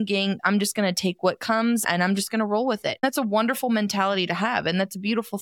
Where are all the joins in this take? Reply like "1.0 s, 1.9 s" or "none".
1.8 s, 3.0 s